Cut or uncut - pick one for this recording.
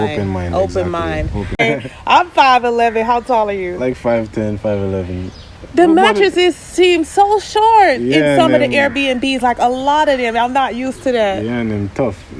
cut